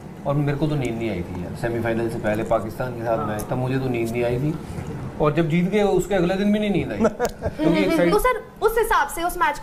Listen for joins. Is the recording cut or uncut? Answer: uncut